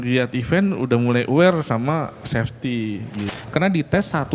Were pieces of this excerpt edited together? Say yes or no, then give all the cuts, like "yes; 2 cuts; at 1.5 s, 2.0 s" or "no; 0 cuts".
yes; 1 cut; at 3.3 s